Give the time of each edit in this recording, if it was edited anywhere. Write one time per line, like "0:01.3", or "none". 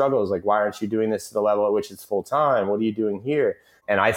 none